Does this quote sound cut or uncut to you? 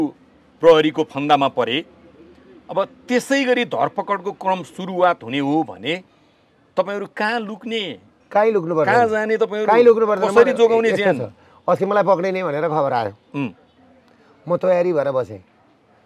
uncut